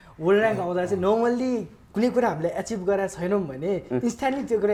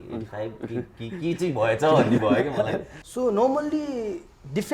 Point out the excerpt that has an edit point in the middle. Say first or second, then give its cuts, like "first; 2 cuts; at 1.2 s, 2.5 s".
second; 1 cut; at 3.0 s